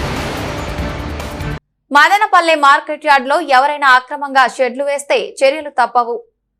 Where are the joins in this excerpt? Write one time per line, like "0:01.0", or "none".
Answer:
0:01.1